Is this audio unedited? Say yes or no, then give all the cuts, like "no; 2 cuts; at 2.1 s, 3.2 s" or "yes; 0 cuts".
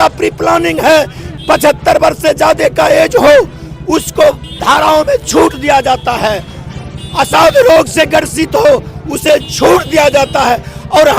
no; 1 cut; at 1.3 s